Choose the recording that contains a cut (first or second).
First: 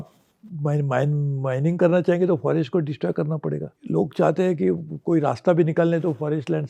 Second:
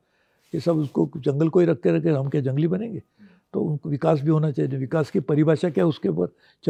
first